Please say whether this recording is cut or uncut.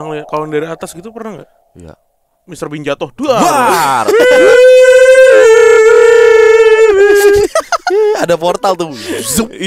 uncut